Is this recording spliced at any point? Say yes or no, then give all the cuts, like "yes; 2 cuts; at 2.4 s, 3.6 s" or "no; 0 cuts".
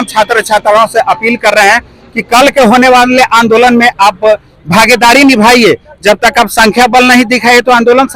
no; 0 cuts